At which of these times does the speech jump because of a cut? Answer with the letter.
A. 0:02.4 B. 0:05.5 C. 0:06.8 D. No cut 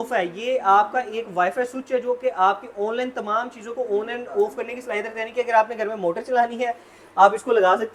D